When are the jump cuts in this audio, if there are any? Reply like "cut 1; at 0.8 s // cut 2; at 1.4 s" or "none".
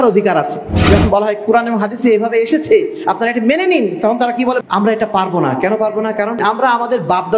cut 1; at 0.9 s // cut 2; at 4.6 s // cut 3; at 6.4 s